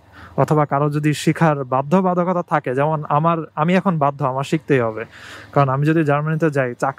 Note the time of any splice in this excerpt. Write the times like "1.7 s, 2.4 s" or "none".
none